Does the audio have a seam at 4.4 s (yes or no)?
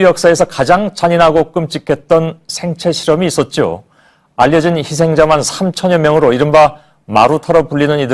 no